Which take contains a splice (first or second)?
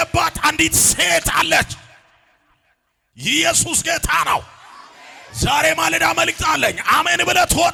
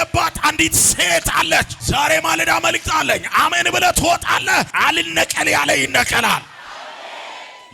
second